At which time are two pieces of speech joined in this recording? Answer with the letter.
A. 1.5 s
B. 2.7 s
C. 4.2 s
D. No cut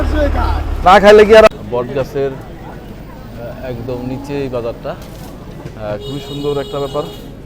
A